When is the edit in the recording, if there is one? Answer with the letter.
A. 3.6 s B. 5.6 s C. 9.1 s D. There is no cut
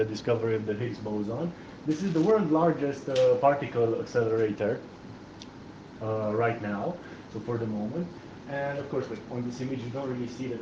A